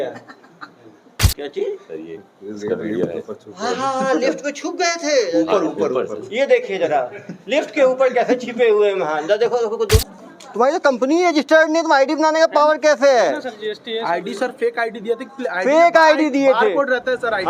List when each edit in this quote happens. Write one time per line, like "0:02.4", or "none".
0:01.2
0:10.0